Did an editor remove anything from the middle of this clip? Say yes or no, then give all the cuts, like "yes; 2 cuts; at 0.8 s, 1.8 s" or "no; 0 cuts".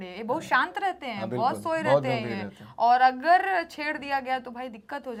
no; 0 cuts